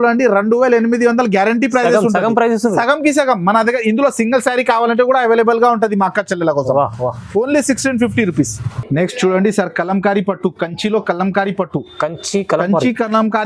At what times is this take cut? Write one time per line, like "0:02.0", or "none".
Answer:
none